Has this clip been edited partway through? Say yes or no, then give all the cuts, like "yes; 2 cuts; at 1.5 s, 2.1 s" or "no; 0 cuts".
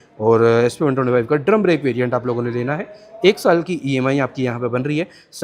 no; 0 cuts